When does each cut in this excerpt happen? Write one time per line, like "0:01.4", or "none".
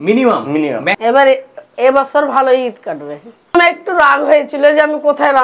0:01.0
0:03.5